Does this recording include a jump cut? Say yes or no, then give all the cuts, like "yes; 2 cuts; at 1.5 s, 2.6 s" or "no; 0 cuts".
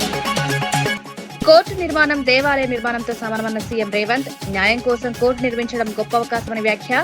yes; 1 cut; at 0.9 s